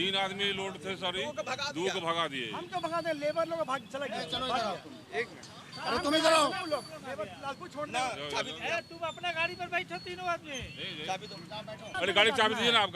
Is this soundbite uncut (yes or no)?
no